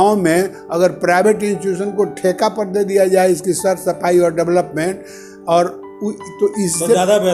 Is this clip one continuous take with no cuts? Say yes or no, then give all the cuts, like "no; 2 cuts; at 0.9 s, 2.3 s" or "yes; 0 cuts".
yes; 0 cuts